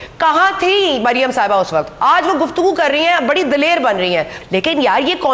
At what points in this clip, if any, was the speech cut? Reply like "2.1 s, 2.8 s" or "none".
1.9 s, 4.4 s